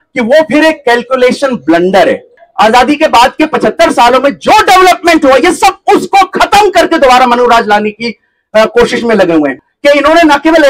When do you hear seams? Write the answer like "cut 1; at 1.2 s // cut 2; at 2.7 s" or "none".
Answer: cut 1; at 2.4 s // cut 2; at 9.6 s